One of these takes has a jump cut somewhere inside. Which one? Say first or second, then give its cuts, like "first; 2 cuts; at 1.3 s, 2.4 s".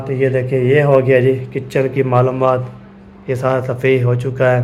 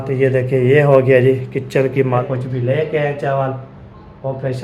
second; 1 cut; at 2.2 s